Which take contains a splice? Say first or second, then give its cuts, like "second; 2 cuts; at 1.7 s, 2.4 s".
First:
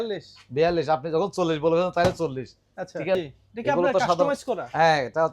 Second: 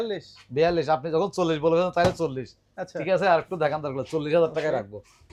first; 1 cut; at 3.1 s